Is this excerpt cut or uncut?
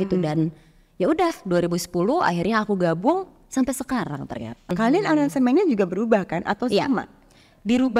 cut